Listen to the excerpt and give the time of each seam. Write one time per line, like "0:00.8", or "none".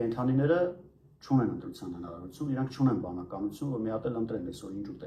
none